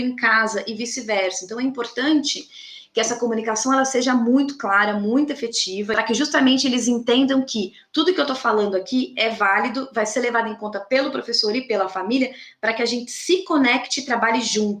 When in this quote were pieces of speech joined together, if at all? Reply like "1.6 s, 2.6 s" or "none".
5.9 s